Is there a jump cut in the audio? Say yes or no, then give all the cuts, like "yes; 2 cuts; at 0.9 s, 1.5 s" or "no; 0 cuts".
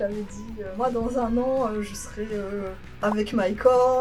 no; 0 cuts